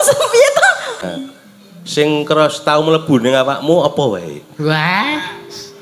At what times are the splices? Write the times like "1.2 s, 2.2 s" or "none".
1.2 s